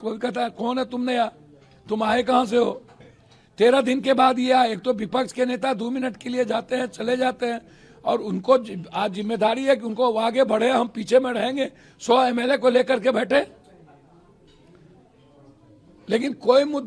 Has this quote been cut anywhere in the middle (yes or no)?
no